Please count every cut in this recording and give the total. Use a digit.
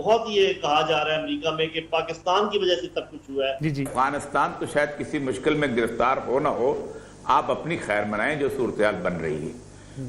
1